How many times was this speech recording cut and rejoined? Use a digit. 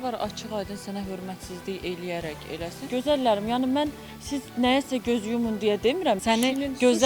2